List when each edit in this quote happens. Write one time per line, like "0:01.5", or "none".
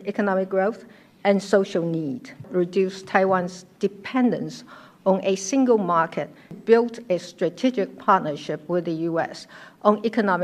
0:02.5
0:06.6